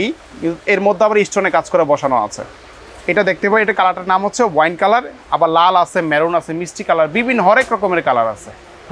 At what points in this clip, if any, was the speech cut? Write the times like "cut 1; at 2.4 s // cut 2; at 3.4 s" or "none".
none

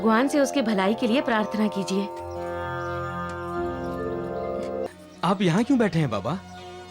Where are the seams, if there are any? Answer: cut 1; at 4.9 s

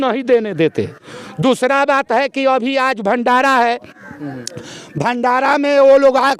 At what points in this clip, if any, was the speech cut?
none

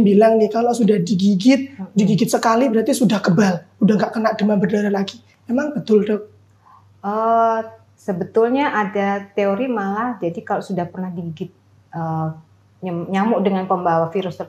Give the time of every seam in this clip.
none

